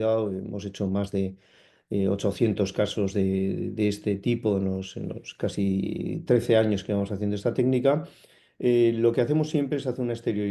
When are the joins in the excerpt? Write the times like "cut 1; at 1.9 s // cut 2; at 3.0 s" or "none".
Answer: none